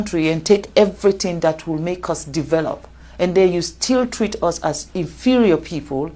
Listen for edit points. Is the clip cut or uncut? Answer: uncut